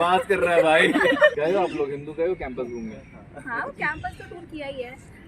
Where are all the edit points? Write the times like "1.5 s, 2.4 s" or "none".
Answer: 1.4 s